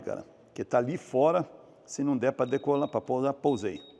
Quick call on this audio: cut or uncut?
uncut